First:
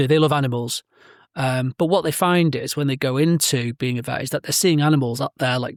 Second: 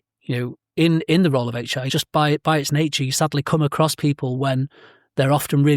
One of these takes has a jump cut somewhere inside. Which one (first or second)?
second